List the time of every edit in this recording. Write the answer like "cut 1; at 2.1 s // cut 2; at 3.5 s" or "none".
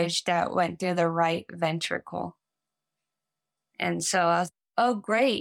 none